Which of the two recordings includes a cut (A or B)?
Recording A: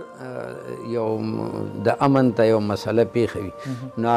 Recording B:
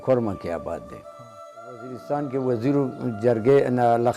B